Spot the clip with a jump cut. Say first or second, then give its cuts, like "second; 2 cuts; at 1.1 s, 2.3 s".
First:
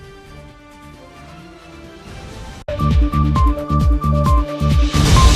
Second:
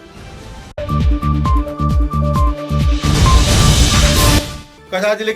second; 1 cut; at 4.4 s